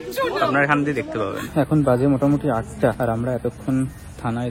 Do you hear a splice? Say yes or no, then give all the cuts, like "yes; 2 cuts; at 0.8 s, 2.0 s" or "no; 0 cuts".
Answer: yes; 2 cuts; at 1.4 s, 3.0 s